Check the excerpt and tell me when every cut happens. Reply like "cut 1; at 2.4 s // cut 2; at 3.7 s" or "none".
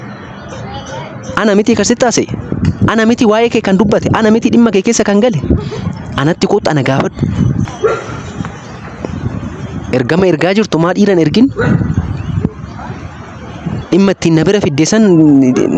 cut 1; at 7.7 s